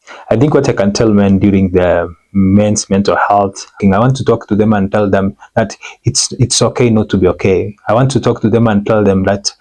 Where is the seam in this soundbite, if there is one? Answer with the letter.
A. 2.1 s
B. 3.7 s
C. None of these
B